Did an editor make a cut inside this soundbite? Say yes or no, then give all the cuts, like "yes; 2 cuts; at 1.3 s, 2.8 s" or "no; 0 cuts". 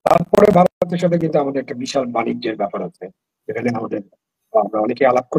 no; 0 cuts